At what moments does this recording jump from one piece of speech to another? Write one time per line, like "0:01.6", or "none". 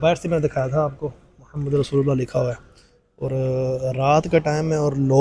none